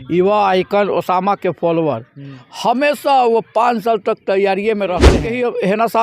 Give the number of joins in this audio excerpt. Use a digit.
1